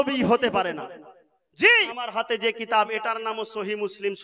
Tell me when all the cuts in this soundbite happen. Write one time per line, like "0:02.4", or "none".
0:01.9